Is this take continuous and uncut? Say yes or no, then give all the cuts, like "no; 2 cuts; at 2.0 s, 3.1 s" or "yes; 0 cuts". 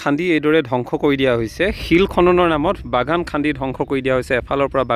yes; 0 cuts